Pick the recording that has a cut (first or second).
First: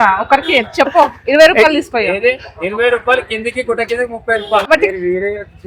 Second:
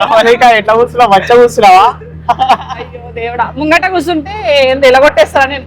first